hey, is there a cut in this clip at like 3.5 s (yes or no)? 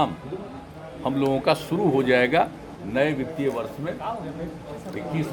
no